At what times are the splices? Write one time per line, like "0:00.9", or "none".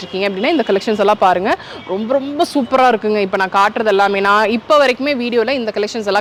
none